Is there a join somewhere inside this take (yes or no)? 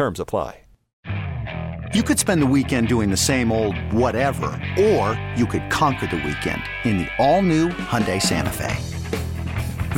yes